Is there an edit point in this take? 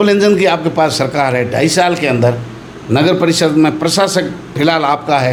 no; 0 cuts

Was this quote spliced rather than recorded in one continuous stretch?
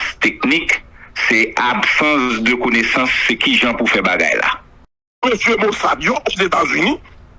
yes; 1 cut; at 5.1 s

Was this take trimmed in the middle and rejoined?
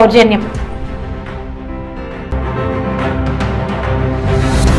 yes; 1 cut; at 2.4 s

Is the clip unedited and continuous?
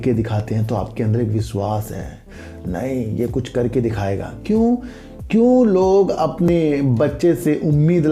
yes; 0 cuts

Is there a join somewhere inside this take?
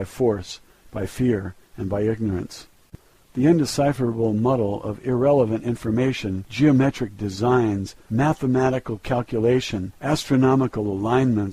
yes; 1 cut; at 5.0 s

